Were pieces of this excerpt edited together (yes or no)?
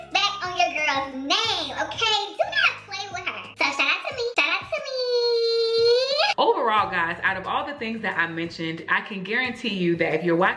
no